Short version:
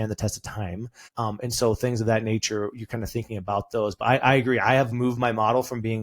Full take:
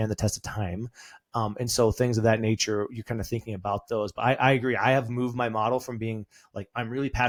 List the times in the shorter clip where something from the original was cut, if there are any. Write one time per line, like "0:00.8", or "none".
0:01.0